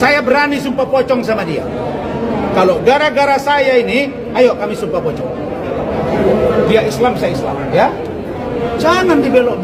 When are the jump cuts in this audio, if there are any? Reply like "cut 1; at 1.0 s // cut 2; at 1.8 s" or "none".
none